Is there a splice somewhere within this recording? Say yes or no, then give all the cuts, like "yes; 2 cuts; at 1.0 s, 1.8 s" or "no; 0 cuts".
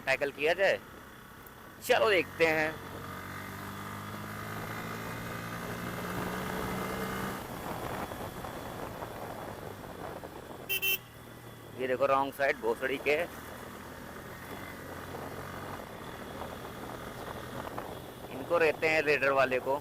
no; 0 cuts